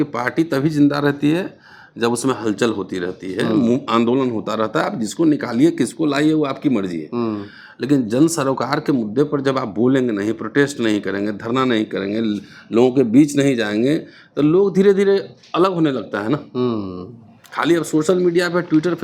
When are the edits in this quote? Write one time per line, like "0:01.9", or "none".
none